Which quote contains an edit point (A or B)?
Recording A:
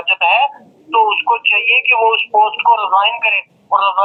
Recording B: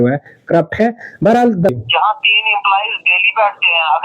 B